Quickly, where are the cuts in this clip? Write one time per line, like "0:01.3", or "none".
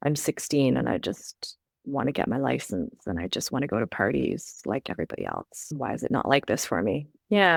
none